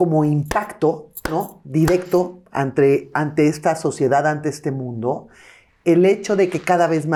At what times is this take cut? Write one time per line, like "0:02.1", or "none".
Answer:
none